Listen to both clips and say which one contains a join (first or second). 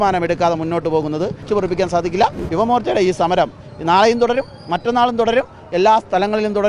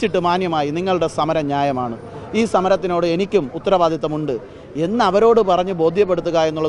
first